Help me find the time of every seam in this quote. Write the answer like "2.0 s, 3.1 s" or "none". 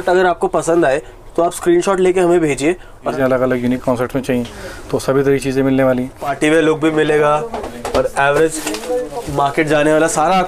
3.1 s, 6.3 s